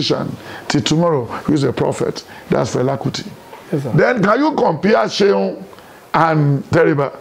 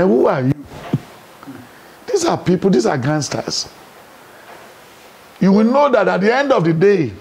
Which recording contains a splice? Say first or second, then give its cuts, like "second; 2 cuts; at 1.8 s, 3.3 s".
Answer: first; 1 cut; at 3.6 s